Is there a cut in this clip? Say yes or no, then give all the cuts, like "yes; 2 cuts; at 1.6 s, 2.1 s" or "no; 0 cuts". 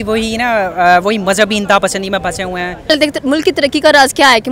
yes; 1 cut; at 2.9 s